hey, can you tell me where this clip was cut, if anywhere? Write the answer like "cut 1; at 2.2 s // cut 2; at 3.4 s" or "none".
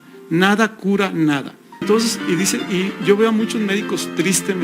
cut 1; at 1.8 s